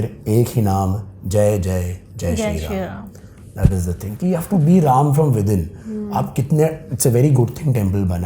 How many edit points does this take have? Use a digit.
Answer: 0